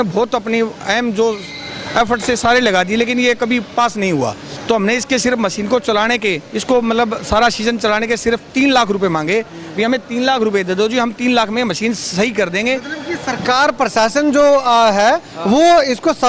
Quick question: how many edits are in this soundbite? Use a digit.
1